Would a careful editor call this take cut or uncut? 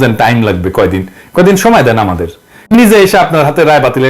cut